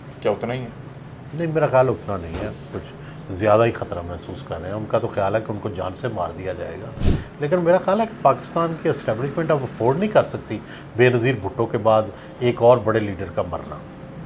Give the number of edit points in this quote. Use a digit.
0